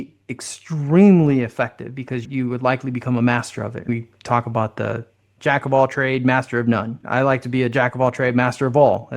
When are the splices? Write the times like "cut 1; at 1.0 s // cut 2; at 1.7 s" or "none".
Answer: cut 1; at 2.3 s // cut 2; at 3.9 s // cut 3; at 5.3 s // cut 4; at 7.0 s